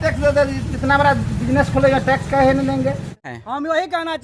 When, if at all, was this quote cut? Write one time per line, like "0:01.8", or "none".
0:03.2

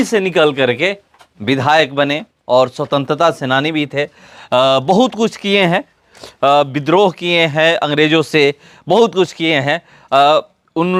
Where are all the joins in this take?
none

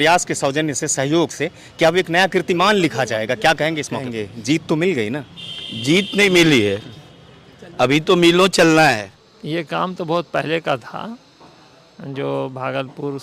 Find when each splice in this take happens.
0:04.2
0:09.5

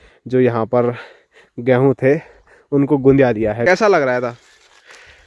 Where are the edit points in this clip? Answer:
0:03.6

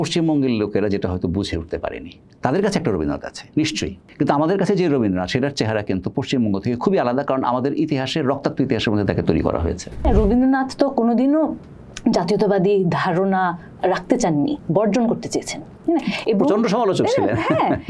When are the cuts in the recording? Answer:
0:04.0
0:10.1

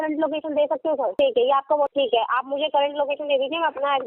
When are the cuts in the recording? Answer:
0:01.1
0:01.9

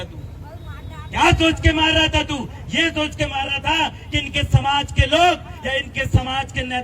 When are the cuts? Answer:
none

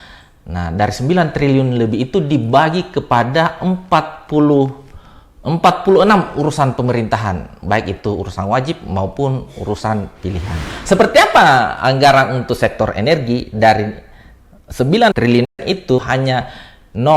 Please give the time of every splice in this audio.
0:10.7
0:16.0

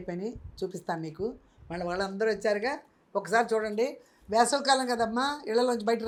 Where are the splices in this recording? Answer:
none

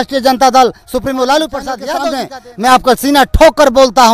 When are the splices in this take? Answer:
0:02.2

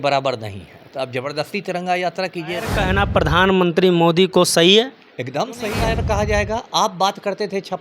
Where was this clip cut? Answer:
0:02.7
0:05.8

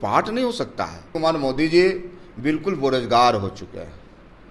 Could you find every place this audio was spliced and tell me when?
0:01.1

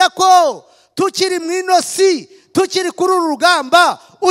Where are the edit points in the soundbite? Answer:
none

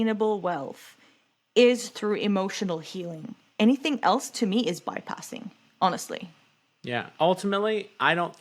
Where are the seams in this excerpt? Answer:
0:07.1

